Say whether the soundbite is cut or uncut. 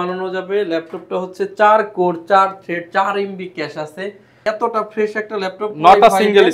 cut